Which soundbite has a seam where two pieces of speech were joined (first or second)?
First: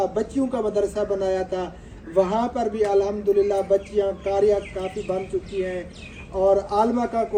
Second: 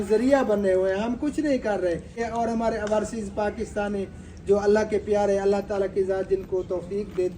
second